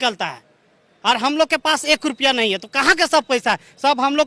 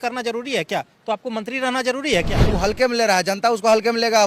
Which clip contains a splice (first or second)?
second